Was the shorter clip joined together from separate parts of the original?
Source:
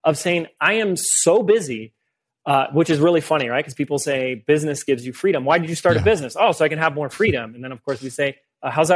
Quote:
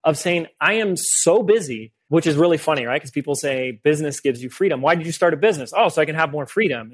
yes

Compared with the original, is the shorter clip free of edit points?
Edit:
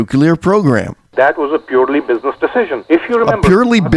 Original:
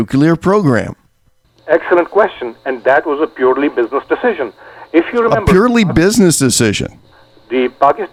no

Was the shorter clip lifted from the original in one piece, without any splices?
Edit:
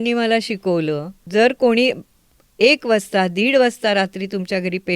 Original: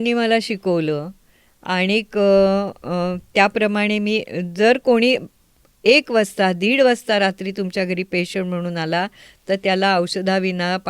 no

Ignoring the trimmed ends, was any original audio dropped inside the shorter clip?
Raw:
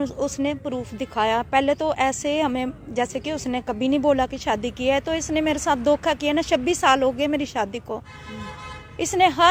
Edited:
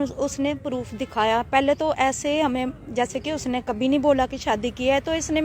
no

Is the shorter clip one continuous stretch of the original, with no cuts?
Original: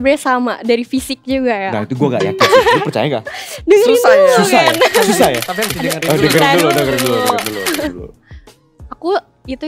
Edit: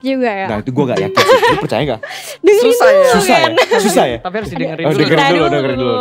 yes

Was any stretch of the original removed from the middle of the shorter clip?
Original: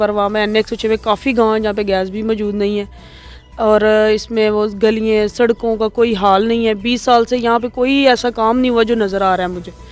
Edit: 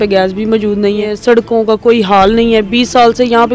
yes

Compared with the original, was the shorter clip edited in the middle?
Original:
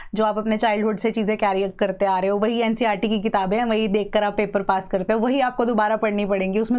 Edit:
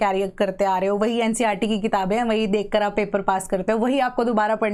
no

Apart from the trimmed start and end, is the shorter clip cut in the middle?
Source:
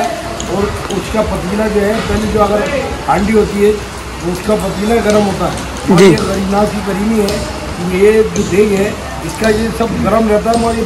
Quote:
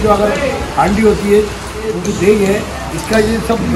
yes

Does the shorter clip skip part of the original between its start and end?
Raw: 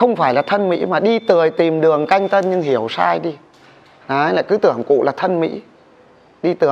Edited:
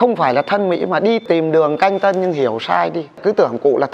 yes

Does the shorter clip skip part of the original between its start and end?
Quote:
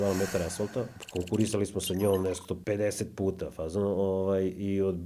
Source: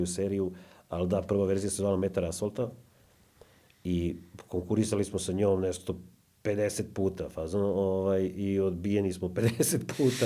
yes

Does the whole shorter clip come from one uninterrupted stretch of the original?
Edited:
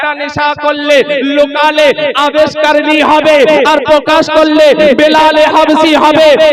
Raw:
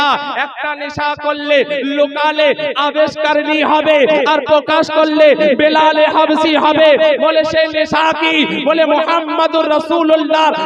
yes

